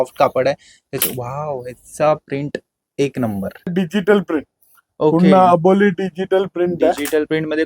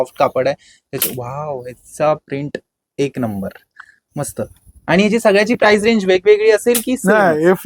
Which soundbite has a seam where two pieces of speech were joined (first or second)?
first